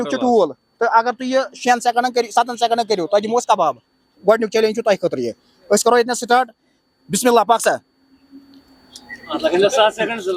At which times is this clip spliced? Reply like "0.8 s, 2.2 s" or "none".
none

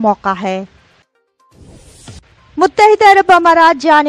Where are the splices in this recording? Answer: 1.1 s

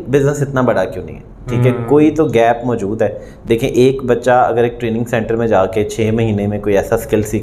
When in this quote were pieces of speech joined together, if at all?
none

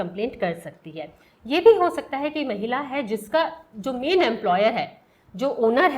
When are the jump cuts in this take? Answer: none

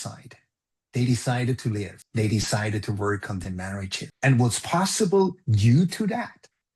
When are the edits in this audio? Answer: 2.0 s, 4.0 s

